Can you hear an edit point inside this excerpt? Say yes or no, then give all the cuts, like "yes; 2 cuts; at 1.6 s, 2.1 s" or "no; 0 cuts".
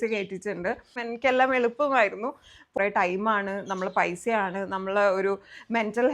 yes; 2 cuts; at 1.0 s, 2.8 s